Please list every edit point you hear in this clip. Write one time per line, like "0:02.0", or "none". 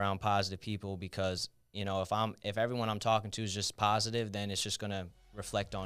none